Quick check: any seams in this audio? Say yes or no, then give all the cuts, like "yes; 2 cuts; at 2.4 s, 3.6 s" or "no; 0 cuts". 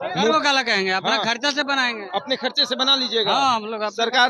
no; 0 cuts